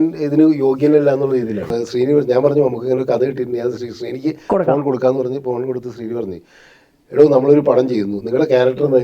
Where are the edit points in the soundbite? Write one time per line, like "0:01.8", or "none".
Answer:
0:01.8